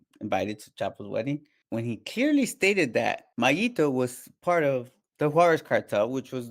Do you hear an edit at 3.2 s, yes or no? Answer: yes